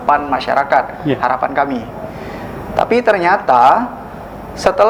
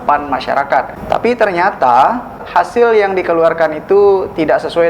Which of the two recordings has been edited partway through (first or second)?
second